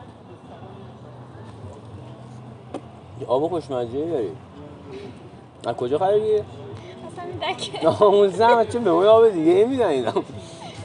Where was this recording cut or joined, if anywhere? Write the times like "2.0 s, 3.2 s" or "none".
none